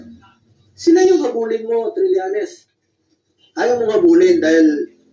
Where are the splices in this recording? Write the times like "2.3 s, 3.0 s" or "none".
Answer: none